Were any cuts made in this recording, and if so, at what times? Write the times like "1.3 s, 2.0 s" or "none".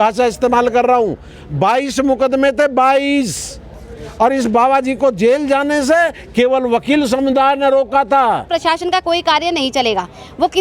8.5 s

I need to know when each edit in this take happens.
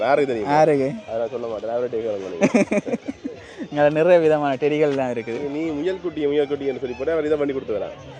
none

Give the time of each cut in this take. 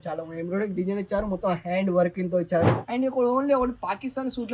2.8 s

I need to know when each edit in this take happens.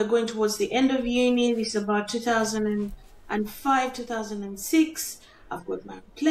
none

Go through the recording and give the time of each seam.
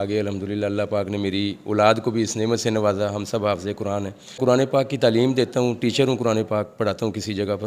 4.4 s

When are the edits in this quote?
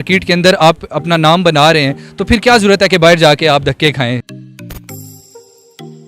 4.3 s

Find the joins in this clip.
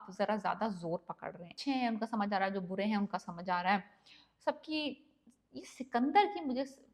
1.5 s

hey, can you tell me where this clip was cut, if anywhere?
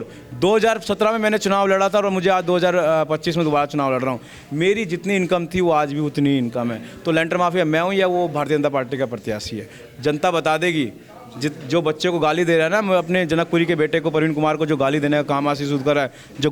none

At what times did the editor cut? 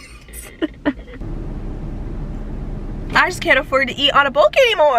1.1 s

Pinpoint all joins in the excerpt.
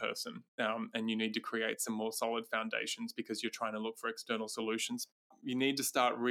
5.4 s

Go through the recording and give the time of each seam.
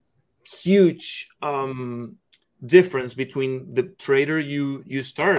none

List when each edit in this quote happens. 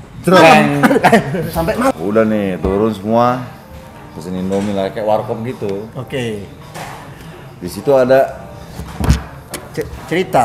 1.9 s

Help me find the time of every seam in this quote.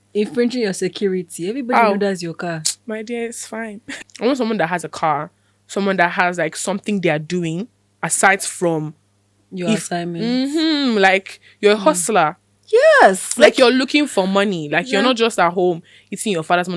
3.8 s

